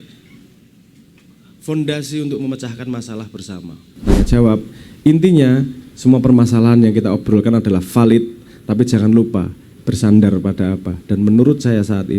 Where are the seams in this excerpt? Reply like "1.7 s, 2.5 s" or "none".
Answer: 4.0 s